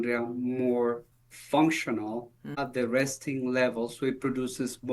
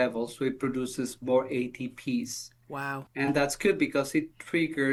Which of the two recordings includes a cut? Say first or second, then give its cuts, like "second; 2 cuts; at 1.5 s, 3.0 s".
first; 1 cut; at 2.5 s